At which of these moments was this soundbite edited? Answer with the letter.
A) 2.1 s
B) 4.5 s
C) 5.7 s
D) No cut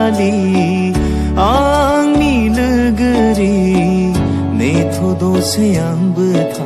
D